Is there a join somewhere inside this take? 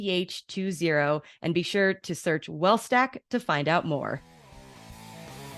yes; 1 cut; at 4.5 s

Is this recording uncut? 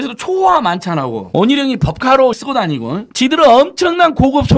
no; 1 cut; at 2.4 s

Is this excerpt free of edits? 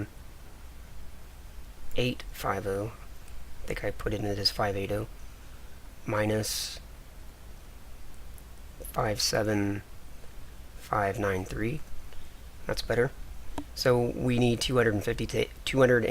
no; 1 cut; at 14.6 s

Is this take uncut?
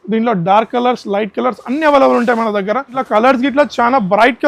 no; 1 cut; at 3.0 s

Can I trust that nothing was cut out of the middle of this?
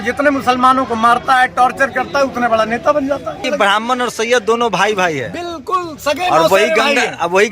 no; 1 cut; at 3.4 s

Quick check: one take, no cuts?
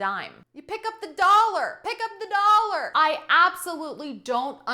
no; 1 cut; at 2.9 s

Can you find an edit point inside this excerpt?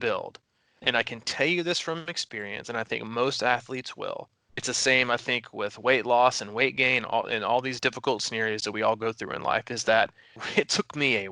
yes; 3 cuts; at 4.5 s, 7.7 s, 10.3 s

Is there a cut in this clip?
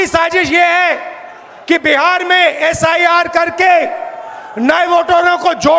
no; 0 cuts

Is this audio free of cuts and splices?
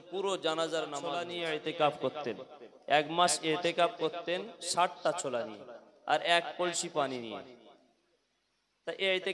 no; 1 cut; at 1.3 s

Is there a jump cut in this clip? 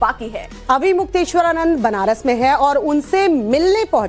yes; 1 cut; at 2.4 s

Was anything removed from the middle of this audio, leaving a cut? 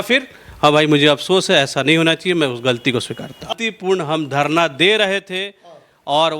yes; 1 cut; at 3.5 s

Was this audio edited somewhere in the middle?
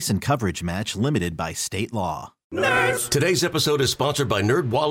yes; 1 cut; at 2.3 s

